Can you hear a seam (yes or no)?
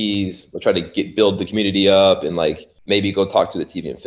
yes